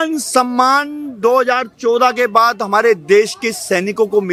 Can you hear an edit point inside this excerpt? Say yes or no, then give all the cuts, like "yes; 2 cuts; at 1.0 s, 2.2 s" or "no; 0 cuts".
no; 0 cuts